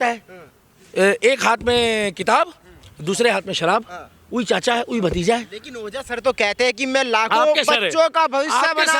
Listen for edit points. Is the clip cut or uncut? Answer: uncut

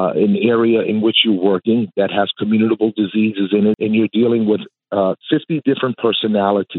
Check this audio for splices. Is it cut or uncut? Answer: cut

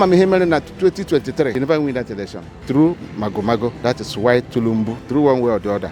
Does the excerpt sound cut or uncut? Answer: cut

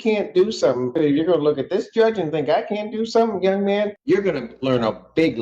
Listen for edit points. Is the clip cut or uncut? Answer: cut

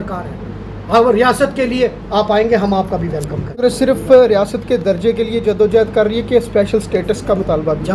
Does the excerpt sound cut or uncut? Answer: cut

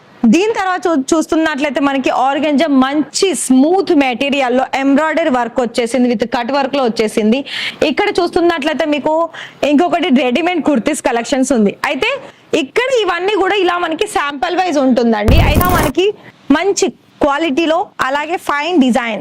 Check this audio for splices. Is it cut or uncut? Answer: cut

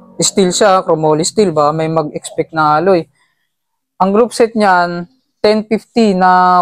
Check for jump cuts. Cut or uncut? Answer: uncut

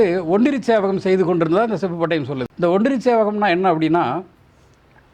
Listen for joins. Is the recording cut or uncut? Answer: cut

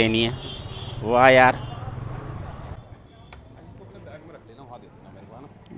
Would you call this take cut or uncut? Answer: cut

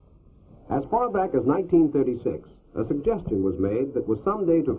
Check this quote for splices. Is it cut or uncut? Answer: uncut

